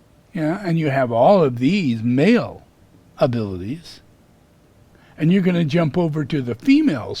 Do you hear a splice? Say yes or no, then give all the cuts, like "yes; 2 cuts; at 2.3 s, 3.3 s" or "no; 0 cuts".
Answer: yes; 1 cut; at 5.0 s